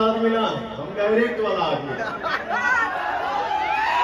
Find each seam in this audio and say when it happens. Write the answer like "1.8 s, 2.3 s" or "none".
none